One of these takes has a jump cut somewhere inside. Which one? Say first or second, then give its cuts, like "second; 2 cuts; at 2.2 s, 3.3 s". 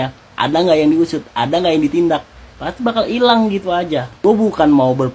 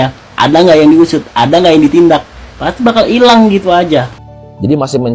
second; 1 cut; at 4.1 s